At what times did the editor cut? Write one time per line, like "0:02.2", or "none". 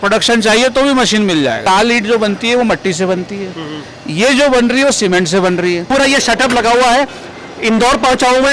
0:01.6
0:05.8

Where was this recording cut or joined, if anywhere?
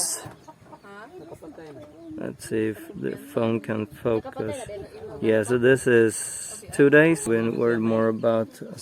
0:07.2

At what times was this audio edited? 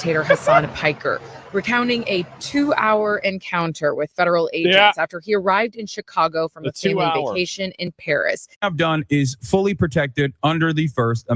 0:08.5

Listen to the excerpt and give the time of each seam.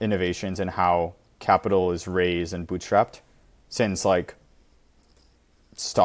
none

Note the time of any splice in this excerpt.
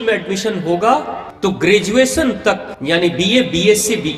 0:01.2
0:02.7

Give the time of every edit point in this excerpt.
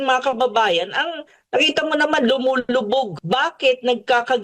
0:03.1

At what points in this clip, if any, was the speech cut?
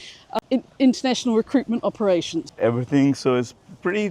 0:02.5

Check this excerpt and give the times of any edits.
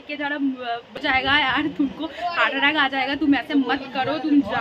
0:01.0

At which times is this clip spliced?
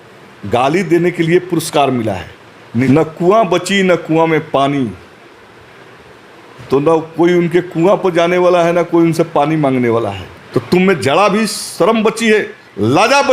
0:02.9
0:10.3

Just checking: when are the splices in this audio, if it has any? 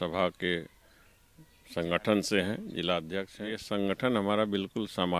0:03.6

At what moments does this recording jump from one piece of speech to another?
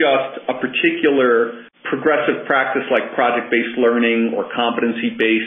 0:01.7

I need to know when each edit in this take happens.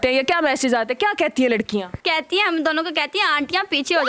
0:01.9

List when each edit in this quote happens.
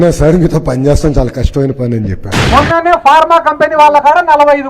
0:02.4

